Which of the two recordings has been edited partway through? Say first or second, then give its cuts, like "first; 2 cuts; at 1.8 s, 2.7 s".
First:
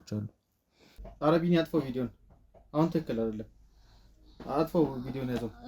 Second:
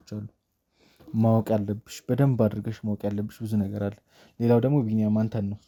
first; 1 cut; at 1.1 s